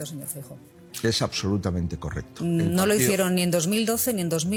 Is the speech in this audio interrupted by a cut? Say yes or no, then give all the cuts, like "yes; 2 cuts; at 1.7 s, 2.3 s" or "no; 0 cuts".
no; 0 cuts